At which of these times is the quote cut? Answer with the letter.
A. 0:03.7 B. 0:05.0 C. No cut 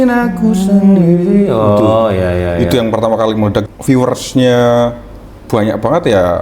A